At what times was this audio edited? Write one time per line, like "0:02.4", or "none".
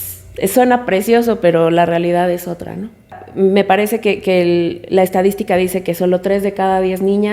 0:03.2